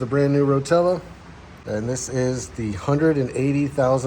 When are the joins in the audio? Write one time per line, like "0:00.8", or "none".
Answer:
0:01.5